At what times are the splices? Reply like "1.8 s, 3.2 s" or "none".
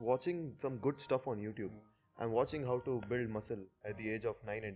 none